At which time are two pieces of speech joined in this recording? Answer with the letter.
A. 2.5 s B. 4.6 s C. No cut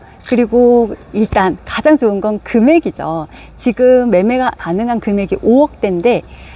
B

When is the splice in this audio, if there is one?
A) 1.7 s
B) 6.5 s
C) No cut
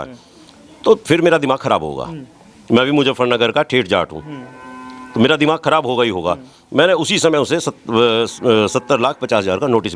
C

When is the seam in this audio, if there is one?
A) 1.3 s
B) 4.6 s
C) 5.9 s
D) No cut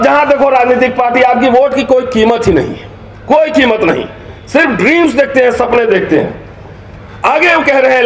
D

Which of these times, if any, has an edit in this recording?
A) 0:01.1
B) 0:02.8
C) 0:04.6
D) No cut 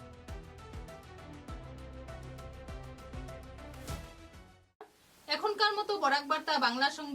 D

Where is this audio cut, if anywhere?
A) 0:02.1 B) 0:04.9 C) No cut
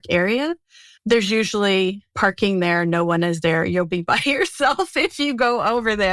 A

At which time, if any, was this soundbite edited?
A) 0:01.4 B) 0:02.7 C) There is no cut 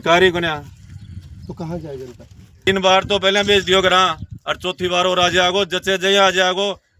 B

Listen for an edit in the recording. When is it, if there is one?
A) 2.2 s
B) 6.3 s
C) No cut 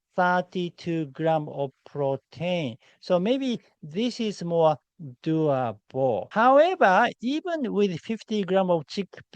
B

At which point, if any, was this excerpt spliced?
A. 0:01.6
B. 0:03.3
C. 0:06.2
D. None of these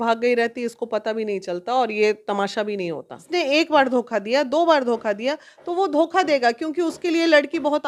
B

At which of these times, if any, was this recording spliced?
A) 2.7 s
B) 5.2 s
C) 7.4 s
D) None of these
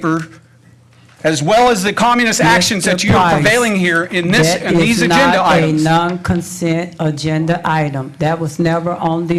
D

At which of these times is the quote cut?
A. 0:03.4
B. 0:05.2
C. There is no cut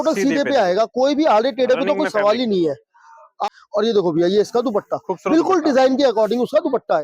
A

